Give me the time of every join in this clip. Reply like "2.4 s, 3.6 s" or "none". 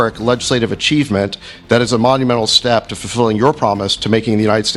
none